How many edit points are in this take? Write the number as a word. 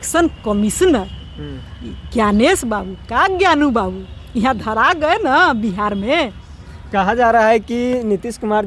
zero